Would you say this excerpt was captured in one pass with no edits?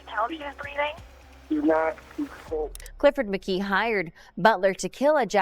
no; 1 cut; at 2.8 s

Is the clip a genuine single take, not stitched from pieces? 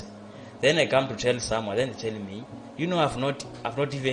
yes; 0 cuts

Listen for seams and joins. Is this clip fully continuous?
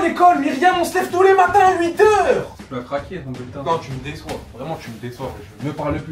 yes; 0 cuts

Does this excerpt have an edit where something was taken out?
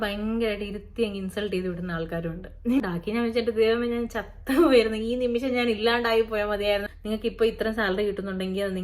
yes; 2 cuts; at 2.8 s, 6.9 s

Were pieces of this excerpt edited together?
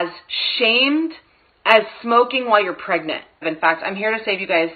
yes; 1 cut; at 3.4 s

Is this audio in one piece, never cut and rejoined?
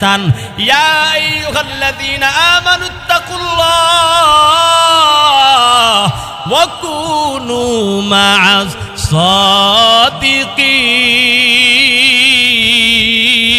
yes; 0 cuts

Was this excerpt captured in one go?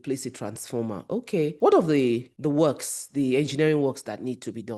no; 2 cuts; at 1.5 s, 2.3 s

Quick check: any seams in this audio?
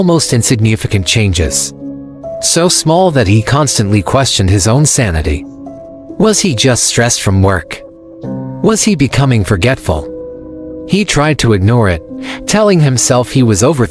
no; 0 cuts

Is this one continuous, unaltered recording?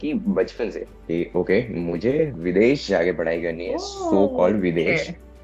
yes; 0 cuts

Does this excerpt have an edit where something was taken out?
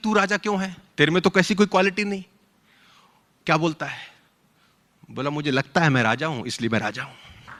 no; 0 cuts

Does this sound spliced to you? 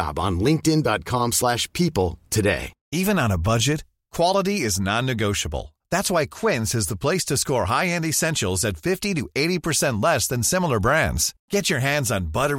yes; 1 cut; at 2.7 s

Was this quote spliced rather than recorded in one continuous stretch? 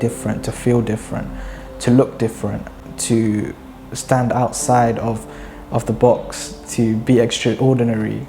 yes; 1 cut; at 2.7 s

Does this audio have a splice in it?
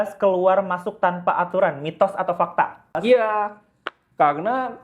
yes; 1 cut; at 3.0 s

